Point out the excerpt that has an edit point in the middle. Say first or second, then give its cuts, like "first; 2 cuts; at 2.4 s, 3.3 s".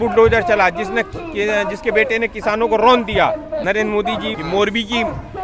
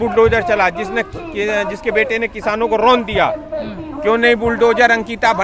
first; 1 cut; at 4.1 s